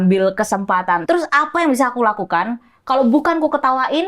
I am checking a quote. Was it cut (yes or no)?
yes